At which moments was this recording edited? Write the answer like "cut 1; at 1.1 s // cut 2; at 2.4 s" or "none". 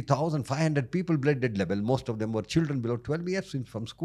none